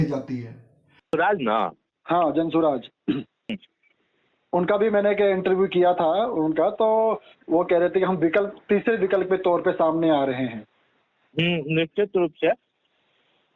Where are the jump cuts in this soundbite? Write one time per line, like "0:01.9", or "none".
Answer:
0:01.0
0:03.5